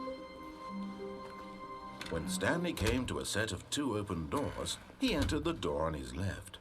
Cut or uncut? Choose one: cut